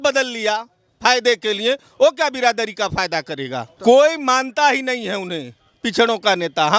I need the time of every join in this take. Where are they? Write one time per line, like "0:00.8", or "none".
0:03.7